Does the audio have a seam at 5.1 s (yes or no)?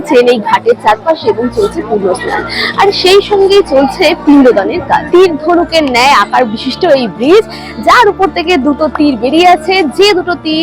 yes